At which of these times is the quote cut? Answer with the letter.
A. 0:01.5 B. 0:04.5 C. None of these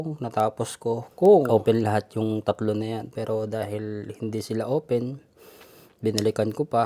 A